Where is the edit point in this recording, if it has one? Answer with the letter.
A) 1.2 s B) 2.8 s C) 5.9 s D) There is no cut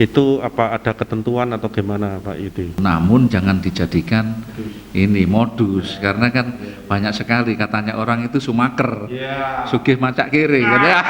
B